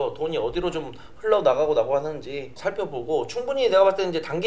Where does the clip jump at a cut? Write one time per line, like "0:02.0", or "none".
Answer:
0:02.5